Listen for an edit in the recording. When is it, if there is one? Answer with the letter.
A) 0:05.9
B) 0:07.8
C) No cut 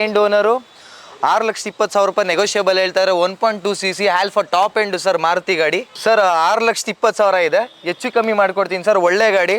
A